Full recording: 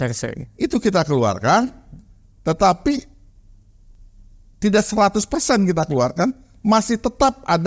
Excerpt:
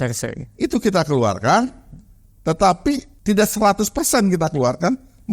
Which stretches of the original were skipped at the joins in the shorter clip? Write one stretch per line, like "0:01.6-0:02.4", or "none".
0:03.1-0:04.5